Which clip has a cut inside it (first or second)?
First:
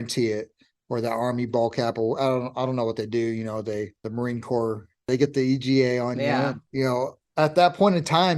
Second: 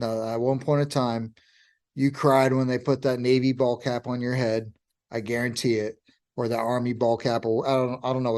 first